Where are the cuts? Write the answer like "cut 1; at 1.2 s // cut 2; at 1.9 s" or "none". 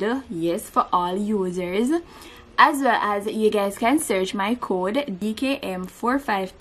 cut 1; at 5.2 s